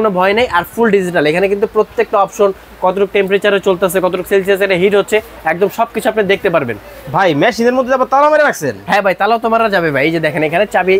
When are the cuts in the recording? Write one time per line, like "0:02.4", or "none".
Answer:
none

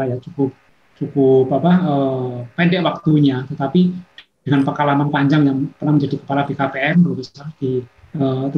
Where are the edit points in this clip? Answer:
none

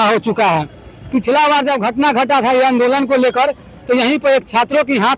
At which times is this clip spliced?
none

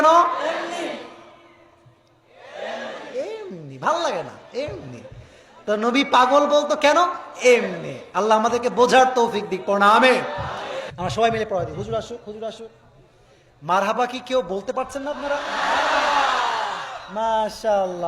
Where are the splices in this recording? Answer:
0:10.8

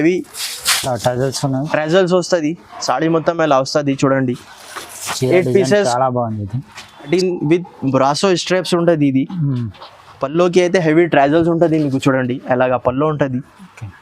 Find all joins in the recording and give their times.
0:07.1

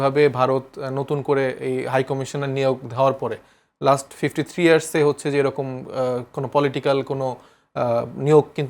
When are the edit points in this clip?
none

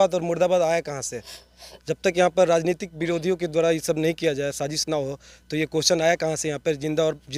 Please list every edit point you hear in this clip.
none

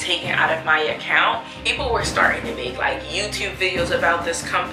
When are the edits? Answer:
0:01.6

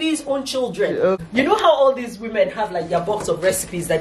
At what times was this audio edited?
0:01.2

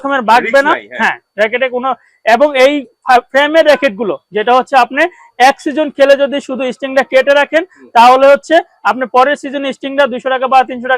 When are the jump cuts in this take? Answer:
none

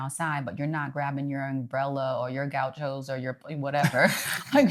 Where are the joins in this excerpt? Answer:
none

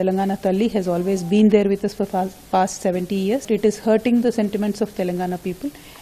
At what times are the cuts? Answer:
0:03.4

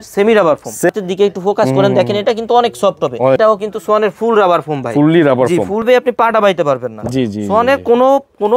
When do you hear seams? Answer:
0:00.9
0:03.4
0:05.9

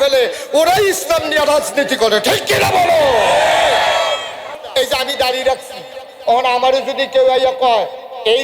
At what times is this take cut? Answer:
0:04.5

